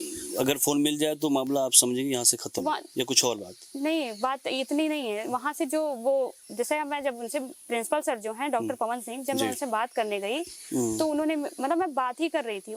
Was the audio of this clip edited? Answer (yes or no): no